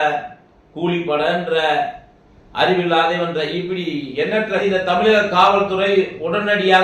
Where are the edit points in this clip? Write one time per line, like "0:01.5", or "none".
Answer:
0:04.6